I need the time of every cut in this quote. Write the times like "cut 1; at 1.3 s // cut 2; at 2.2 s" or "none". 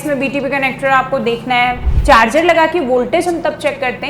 cut 1; at 1.9 s